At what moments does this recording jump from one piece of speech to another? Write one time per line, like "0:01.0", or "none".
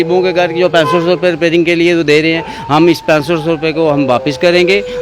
none